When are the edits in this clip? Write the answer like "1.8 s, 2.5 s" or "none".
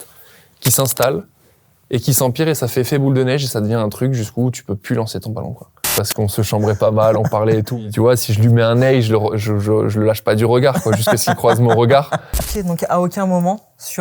5.9 s, 7.8 s, 12.5 s